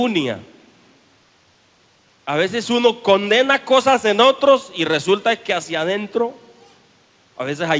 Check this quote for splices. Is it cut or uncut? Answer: cut